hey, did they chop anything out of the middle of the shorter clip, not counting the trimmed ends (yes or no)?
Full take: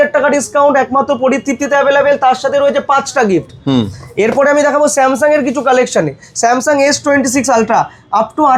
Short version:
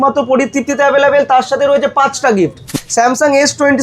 yes